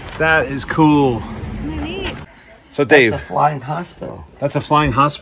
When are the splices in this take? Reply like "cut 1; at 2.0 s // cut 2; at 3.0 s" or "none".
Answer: cut 1; at 2.3 s